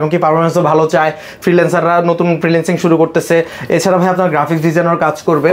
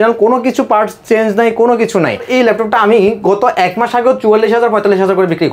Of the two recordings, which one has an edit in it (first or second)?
second